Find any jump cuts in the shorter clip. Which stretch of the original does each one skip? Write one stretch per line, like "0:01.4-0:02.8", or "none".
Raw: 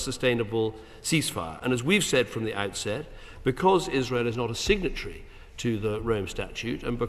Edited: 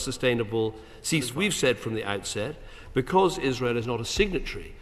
0:01.3-0:01.8